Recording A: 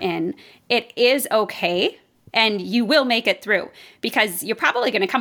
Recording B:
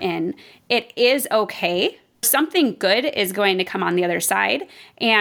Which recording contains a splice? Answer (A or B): B